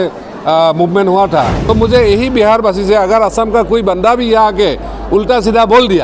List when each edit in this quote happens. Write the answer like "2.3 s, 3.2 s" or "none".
1.6 s